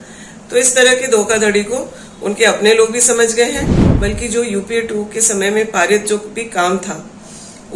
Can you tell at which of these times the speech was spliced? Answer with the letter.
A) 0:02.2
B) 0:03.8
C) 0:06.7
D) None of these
B